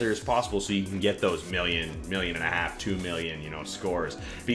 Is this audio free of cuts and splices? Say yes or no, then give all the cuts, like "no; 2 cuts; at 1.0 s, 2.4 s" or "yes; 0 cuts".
yes; 0 cuts